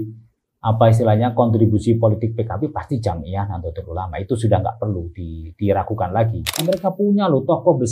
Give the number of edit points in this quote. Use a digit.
1